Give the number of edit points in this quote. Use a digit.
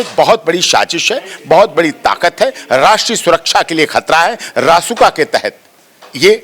0